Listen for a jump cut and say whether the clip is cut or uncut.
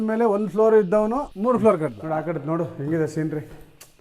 cut